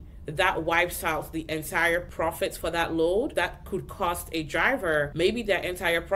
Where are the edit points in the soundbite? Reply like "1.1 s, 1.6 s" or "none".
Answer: 2.1 s, 3.3 s, 5.1 s